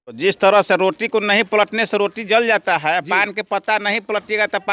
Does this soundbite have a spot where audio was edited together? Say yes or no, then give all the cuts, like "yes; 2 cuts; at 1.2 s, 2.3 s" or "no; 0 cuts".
no; 0 cuts